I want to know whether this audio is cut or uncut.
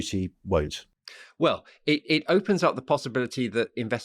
uncut